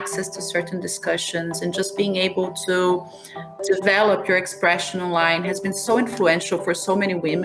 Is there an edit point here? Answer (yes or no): no